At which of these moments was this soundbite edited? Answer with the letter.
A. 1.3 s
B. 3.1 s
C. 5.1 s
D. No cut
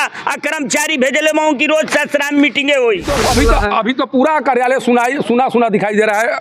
B